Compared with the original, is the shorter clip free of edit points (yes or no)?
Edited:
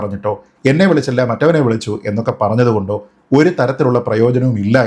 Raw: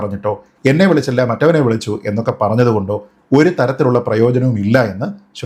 yes